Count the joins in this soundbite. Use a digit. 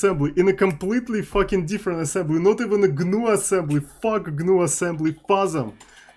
0